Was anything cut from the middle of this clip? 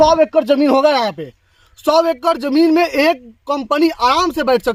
no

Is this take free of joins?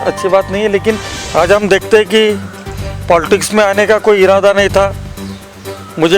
no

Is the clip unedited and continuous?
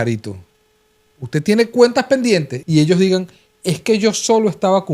no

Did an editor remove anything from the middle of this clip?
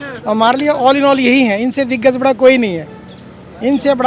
no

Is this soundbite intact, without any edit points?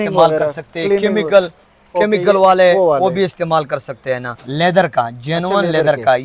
no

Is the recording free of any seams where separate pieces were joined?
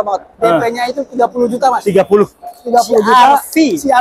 yes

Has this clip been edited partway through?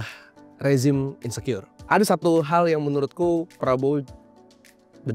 yes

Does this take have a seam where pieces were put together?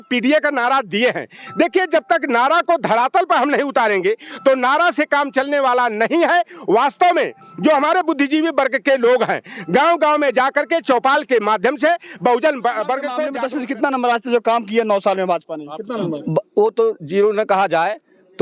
yes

